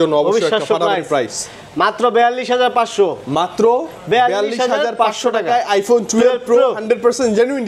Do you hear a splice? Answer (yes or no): no